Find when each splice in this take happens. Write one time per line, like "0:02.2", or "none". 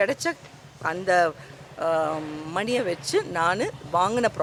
none